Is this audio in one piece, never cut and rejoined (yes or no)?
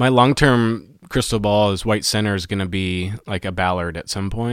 no